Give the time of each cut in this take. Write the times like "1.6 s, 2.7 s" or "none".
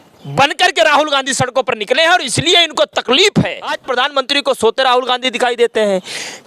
3.8 s